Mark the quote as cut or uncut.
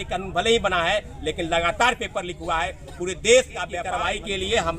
cut